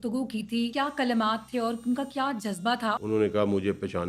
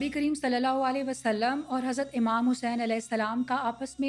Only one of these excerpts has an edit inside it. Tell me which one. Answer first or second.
first